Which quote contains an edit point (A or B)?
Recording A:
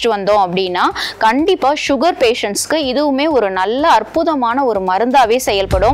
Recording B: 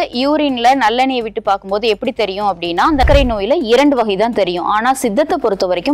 B